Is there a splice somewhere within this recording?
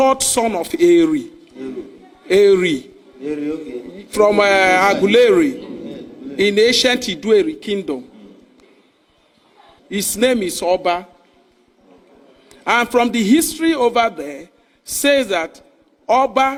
no; 0 cuts

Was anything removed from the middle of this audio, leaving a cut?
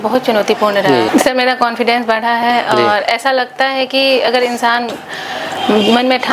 yes; 1 cut; at 1.1 s

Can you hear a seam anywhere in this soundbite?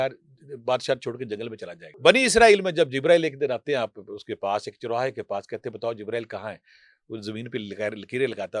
yes; 1 cut; at 2.0 s

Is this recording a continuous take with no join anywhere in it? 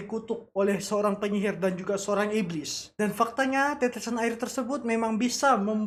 yes; 0 cuts

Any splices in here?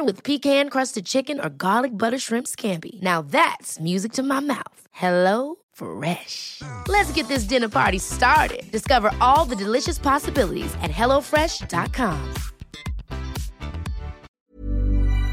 yes; 1 cut; at 14.3 s

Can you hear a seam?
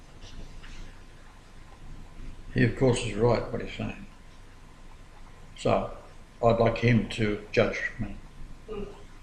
no; 0 cuts

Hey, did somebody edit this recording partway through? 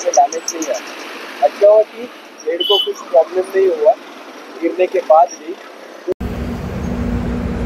yes; 1 cut; at 6.1 s

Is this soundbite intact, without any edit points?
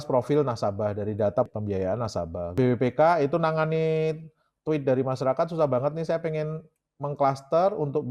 yes; 0 cuts

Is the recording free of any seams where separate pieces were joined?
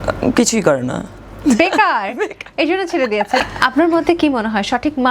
no; 1 cut; at 3.4 s

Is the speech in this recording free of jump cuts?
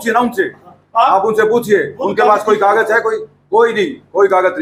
yes; 0 cuts

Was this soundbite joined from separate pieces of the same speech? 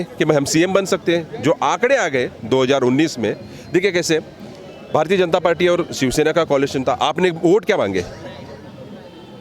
no; 0 cuts

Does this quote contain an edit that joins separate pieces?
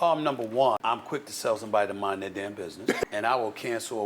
yes; 2 cuts; at 0.8 s, 3.0 s

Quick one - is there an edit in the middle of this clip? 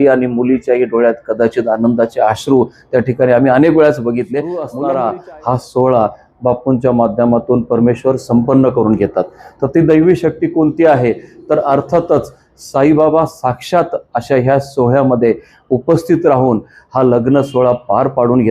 yes; 1 cut; at 4.7 s

